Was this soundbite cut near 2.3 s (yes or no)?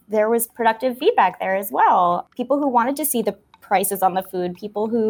yes